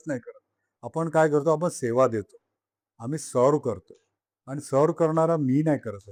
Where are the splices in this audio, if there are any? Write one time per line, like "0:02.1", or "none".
none